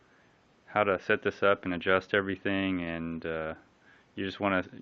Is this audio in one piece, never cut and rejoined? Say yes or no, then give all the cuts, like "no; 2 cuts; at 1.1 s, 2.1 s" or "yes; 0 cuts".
no; 1 cut; at 2.2 s